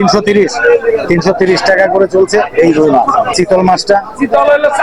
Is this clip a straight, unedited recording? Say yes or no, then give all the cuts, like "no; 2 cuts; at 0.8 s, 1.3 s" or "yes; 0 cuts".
no; 1 cut; at 3.3 s